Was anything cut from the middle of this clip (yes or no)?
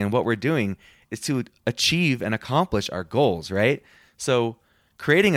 no